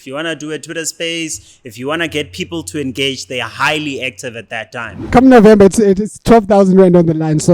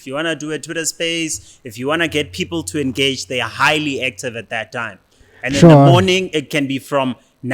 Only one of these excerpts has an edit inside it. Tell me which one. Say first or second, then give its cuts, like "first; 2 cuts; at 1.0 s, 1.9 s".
first; 1 cut; at 5.1 s